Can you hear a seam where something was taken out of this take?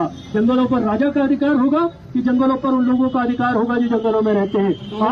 no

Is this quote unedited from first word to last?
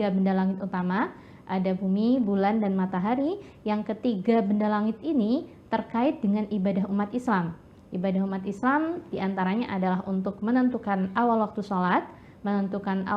yes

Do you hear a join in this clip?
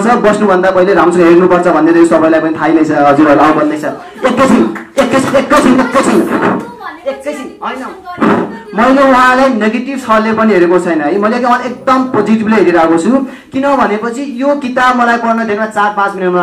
no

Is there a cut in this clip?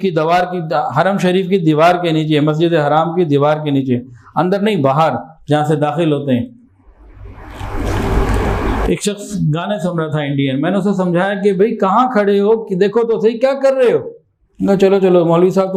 no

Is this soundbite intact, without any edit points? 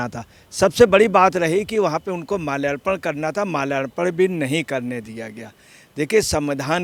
yes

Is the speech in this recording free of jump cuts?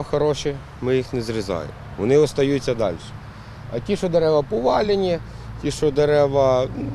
yes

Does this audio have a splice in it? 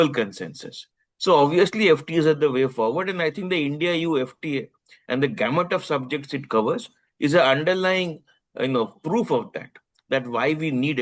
no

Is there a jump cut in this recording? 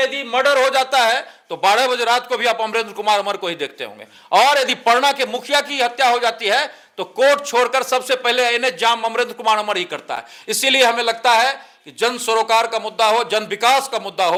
no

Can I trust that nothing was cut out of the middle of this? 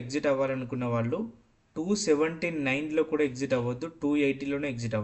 yes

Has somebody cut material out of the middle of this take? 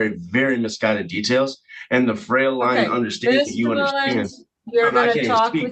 no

